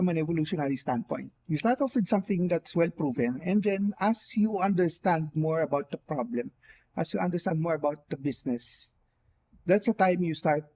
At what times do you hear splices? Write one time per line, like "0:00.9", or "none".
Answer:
none